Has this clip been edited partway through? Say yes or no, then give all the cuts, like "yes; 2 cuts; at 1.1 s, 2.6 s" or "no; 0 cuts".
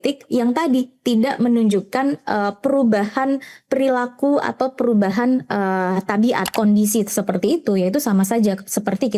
yes; 1 cut; at 6.5 s